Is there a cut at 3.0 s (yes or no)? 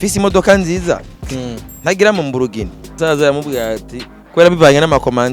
yes